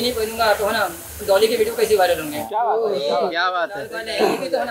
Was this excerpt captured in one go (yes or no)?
yes